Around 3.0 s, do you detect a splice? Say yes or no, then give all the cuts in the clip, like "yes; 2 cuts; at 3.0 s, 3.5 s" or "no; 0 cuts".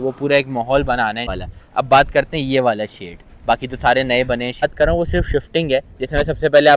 no; 2 cuts; at 1.3 s, 4.6 s